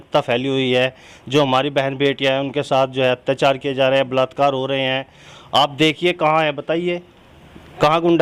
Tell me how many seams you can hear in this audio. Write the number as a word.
zero